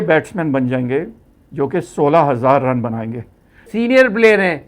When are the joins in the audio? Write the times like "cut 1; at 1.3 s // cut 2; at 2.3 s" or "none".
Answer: cut 1; at 3.7 s